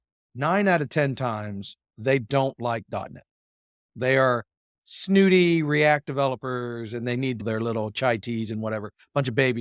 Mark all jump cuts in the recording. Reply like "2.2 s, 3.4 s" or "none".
7.4 s

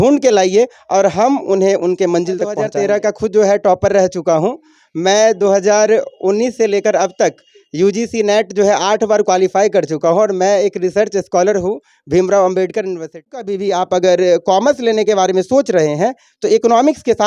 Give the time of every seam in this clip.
2.6 s, 13.4 s

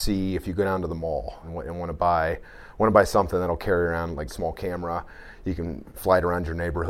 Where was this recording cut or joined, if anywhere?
1.4 s, 4.3 s

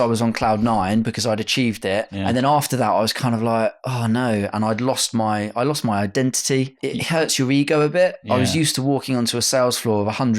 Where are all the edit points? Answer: 2.1 s, 6.7 s

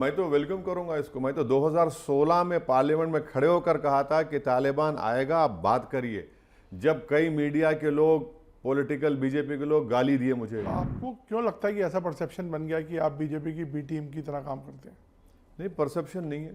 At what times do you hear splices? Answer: 10.6 s

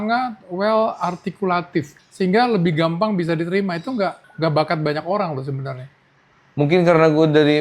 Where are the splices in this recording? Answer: 2.0 s, 4.2 s

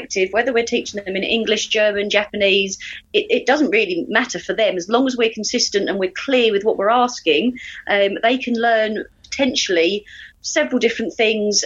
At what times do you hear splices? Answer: none

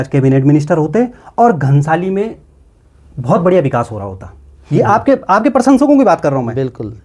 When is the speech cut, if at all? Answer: none

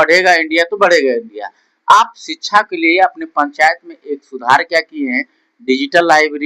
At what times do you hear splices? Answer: none

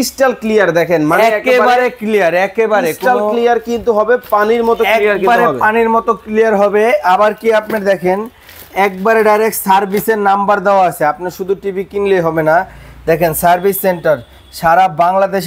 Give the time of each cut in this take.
none

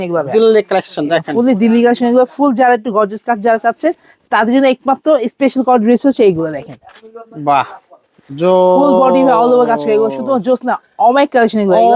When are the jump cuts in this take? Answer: none

